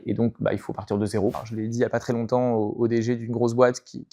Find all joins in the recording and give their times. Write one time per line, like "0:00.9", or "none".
0:01.4